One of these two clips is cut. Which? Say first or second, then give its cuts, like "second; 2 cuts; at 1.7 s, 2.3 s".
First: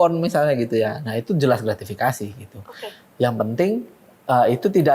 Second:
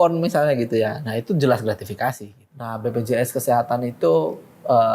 second; 1 cut; at 2.7 s